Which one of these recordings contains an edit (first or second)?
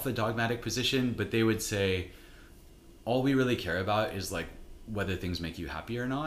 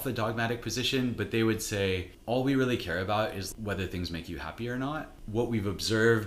second